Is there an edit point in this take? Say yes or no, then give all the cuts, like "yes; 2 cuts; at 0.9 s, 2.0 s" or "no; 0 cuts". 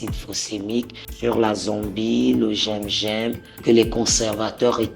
yes; 2 cuts; at 1.0 s, 3.6 s